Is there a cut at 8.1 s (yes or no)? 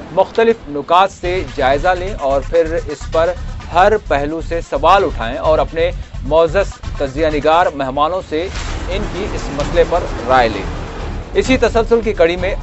yes